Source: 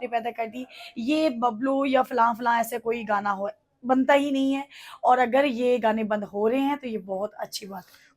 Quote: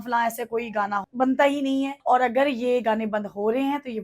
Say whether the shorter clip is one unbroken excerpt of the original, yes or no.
no